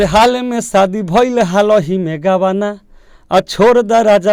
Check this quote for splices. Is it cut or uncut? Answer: uncut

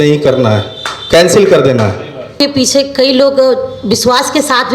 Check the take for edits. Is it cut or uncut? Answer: cut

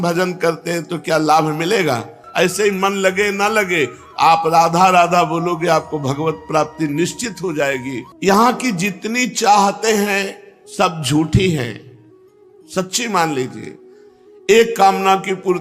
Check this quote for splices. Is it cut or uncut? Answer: cut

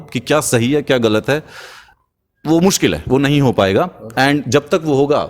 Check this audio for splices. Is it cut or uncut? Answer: uncut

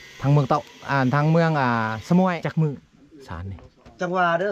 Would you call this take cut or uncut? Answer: cut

